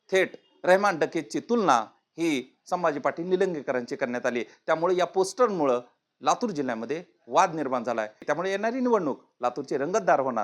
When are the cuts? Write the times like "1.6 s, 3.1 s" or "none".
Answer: 8.2 s